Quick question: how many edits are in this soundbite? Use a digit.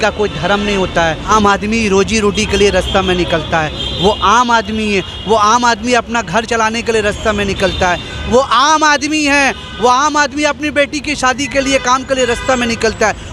1